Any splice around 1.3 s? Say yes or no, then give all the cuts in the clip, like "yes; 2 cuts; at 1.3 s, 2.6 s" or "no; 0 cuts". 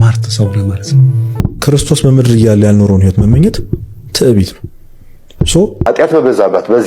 yes; 2 cuts; at 1.3 s, 5.9 s